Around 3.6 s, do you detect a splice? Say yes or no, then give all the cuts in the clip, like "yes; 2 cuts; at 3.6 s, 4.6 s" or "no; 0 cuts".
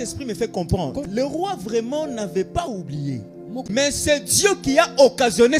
yes; 2 cuts; at 1.0 s, 3.6 s